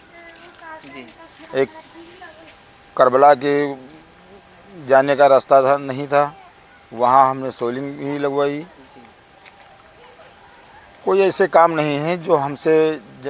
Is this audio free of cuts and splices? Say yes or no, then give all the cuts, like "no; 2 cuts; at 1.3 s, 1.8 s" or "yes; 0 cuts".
yes; 0 cuts